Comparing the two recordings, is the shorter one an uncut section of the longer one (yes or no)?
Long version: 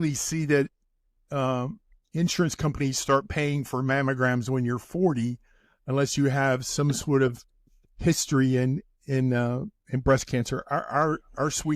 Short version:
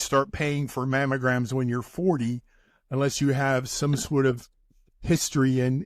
yes